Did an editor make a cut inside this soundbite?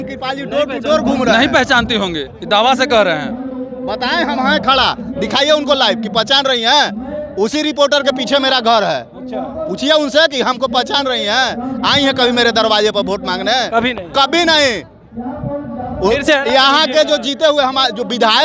no; 0 cuts

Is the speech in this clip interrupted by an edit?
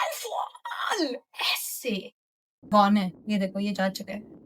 yes; 1 cut; at 2.7 s

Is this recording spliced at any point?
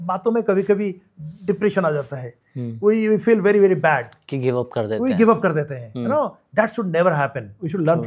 no; 0 cuts

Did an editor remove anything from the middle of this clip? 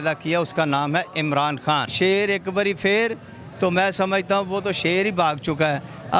yes; 1 cut; at 1.9 s

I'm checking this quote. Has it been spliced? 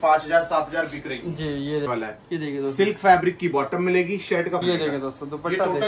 yes; 2 cuts; at 1.9 s, 4.6 s

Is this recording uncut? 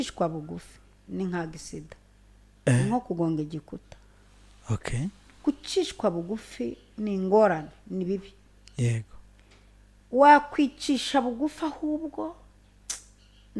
yes; 0 cuts

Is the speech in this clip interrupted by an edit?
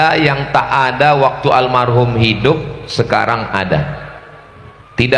no; 0 cuts

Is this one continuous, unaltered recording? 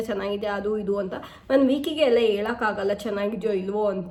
yes; 0 cuts

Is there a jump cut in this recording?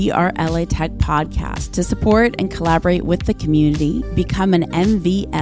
no; 0 cuts

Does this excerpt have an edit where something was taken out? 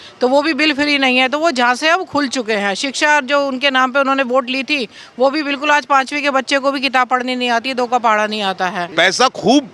yes; 1 cut; at 8.8 s

